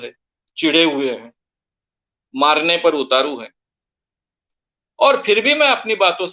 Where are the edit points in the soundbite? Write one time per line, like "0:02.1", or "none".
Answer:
none